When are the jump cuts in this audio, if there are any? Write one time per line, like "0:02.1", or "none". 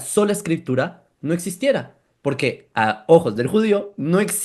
0:02.0